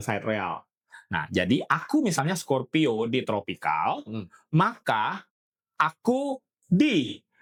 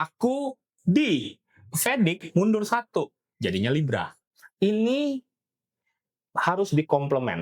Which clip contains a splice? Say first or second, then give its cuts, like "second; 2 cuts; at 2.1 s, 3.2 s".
second; 1 cut; at 4.2 s